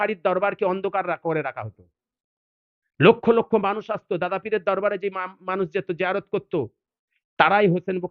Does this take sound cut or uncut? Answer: uncut